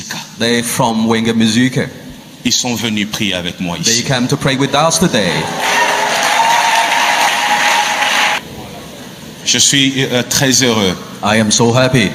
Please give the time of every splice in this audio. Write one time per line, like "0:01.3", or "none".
0:08.4